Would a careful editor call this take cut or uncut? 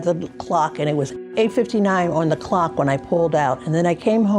cut